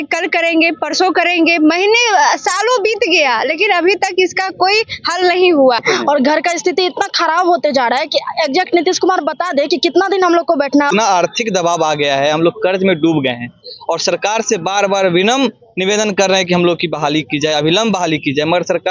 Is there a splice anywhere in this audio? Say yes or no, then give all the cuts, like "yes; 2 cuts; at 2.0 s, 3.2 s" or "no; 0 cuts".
yes; 2 cuts; at 5.8 s, 10.9 s